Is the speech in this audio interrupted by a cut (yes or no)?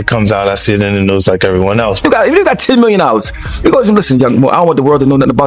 yes